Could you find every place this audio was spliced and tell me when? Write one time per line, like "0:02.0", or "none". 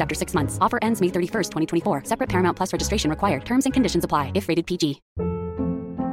none